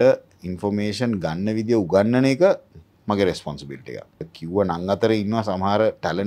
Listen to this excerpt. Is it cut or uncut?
cut